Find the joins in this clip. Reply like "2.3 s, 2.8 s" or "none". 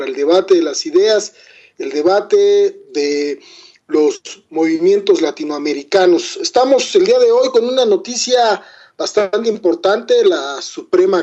none